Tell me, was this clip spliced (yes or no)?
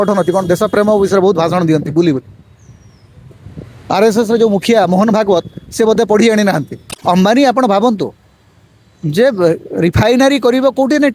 yes